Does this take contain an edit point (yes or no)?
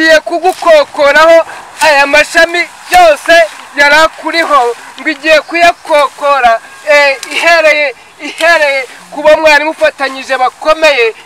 no